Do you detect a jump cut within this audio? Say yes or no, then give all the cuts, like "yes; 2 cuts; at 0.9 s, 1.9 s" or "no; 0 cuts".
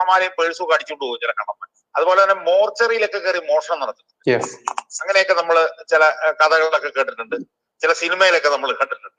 yes; 1 cut; at 1.7 s